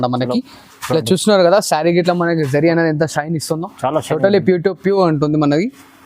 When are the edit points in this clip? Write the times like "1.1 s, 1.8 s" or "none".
none